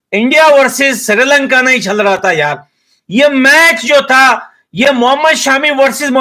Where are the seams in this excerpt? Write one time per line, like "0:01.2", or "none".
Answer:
none